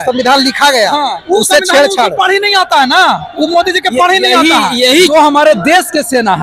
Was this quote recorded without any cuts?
no; 1 cut; at 5.1 s

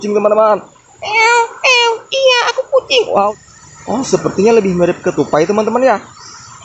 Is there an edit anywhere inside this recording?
yes; 1 cut; at 3.3 s

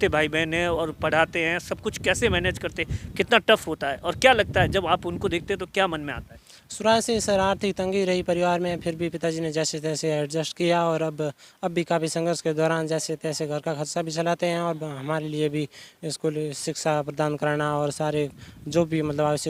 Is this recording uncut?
yes; 0 cuts

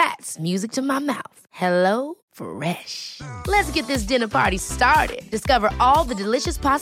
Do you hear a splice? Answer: no; 0 cuts

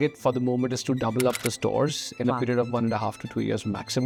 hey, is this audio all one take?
yes; 0 cuts

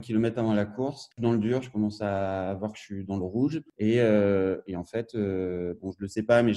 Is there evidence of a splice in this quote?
yes; 2 cuts; at 1.1 s, 3.7 s

